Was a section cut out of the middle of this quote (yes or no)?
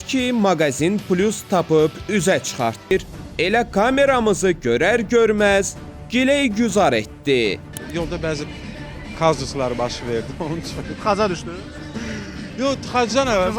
no